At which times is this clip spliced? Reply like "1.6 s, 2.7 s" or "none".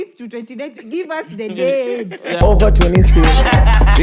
2.4 s